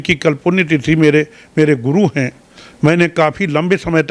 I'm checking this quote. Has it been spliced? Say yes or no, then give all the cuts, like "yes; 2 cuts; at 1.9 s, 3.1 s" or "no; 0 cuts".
no; 0 cuts